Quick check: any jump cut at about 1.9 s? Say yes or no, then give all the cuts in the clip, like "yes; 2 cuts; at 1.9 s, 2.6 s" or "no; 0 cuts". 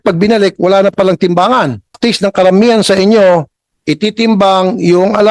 yes; 1 cut; at 1.9 s